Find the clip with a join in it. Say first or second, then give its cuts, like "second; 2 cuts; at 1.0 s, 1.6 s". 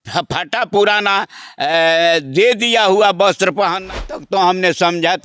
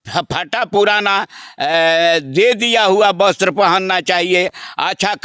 first; 1 cut; at 4.0 s